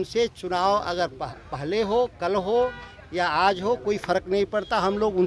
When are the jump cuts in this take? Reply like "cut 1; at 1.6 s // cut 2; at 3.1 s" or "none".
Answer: none